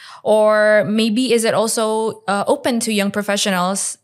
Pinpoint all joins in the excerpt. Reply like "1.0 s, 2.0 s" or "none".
none